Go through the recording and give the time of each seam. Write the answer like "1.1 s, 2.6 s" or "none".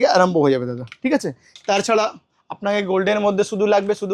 none